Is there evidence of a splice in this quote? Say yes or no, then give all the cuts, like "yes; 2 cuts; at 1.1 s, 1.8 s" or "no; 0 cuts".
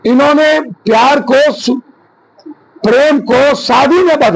no; 0 cuts